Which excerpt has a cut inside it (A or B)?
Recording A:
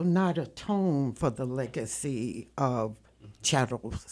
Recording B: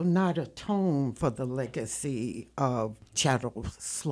B